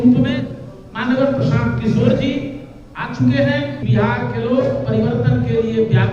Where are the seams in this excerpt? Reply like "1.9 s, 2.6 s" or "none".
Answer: 3.8 s